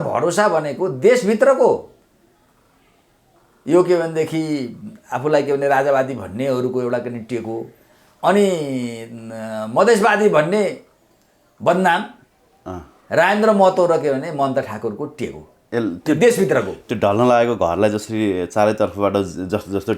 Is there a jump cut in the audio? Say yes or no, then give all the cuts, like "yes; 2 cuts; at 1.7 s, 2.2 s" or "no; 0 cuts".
no; 0 cuts